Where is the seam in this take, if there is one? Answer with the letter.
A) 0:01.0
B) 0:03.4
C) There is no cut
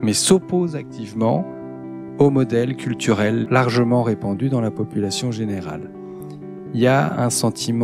B